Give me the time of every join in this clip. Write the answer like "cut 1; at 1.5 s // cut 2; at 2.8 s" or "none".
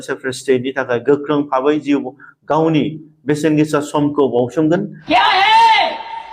cut 1; at 5.0 s